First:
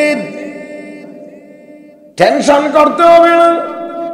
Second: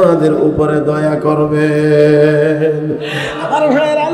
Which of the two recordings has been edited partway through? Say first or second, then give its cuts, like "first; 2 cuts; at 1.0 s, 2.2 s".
first; 1 cut; at 2.0 s